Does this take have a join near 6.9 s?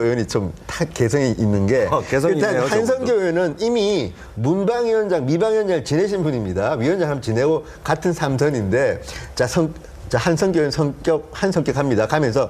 yes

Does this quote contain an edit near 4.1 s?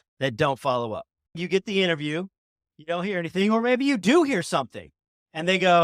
no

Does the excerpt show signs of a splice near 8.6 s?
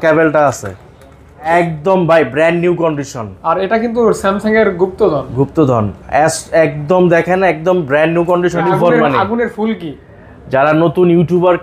yes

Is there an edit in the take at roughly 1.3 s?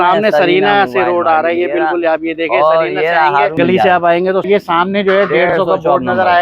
no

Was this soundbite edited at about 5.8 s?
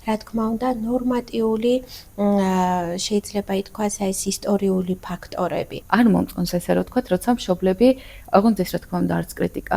yes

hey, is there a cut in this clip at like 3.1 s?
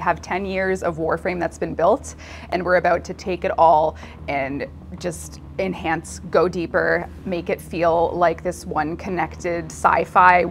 no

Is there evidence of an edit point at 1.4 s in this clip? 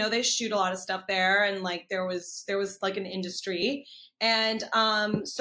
no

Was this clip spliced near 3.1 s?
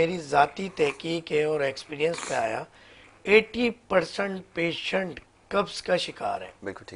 no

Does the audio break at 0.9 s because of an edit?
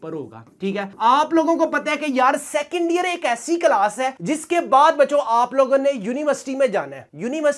no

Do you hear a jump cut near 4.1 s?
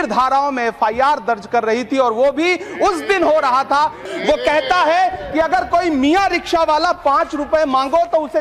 yes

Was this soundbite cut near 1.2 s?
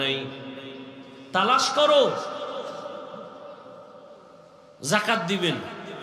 no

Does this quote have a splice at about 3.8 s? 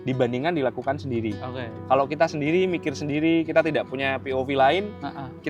no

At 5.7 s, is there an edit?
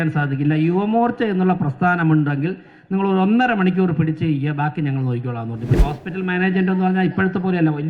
yes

